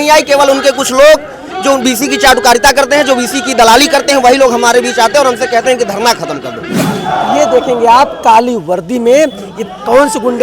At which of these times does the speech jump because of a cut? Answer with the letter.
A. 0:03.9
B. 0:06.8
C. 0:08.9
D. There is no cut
B